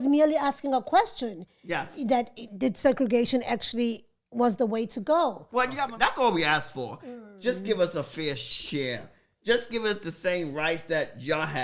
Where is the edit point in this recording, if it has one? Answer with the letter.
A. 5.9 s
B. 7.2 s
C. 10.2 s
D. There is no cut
A